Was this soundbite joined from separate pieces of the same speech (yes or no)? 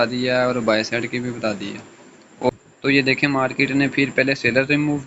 yes